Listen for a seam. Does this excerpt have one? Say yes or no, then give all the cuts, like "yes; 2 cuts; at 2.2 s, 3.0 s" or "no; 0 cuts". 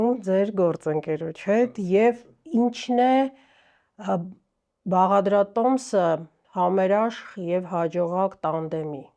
no; 0 cuts